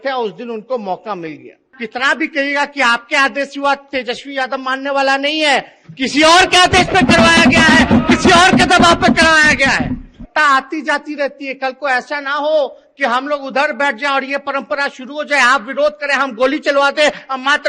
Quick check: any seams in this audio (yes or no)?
yes